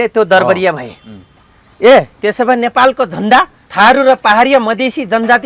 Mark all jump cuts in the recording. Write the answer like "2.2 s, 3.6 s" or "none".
3.6 s